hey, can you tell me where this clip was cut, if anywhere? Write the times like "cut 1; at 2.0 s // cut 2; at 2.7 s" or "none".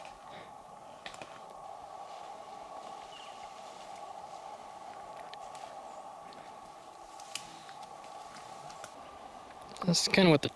cut 1; at 1.6 s // cut 2; at 9.0 s

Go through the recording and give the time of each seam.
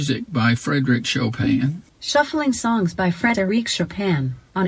cut 1; at 1.9 s

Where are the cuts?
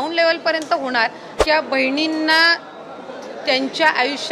cut 1; at 1.3 s

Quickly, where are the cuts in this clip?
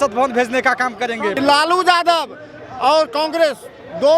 cut 1; at 1.4 s

